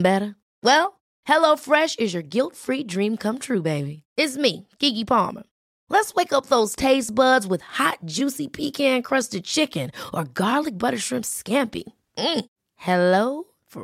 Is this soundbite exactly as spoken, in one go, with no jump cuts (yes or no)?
yes